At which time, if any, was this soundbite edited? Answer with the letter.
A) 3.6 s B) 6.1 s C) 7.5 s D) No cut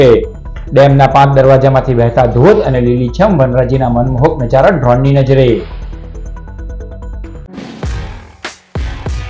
C